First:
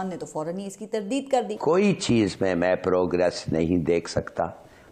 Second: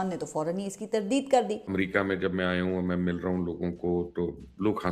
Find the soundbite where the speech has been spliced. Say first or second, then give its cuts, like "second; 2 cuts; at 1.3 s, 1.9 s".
first; 1 cut; at 1.5 s